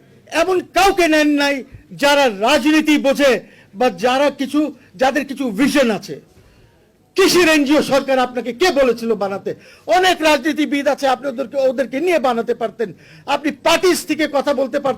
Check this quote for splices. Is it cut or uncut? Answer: uncut